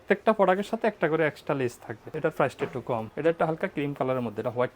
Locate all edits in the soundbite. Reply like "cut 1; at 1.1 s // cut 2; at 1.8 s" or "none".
cut 1; at 2.1 s // cut 2; at 3.1 s